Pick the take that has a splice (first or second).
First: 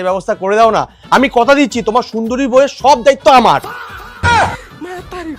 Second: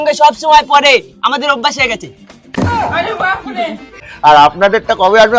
second